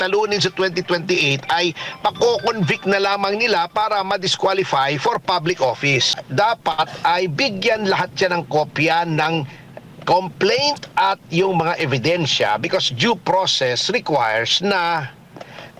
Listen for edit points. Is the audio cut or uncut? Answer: cut